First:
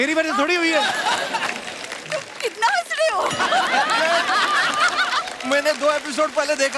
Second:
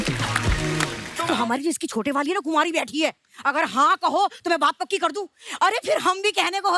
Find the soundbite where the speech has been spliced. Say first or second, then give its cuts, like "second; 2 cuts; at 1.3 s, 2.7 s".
second; 1 cut; at 1.1 s